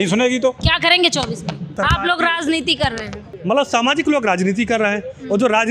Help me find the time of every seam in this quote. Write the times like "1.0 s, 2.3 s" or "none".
1.7 s, 3.2 s